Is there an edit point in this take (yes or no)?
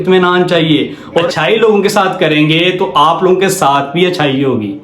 yes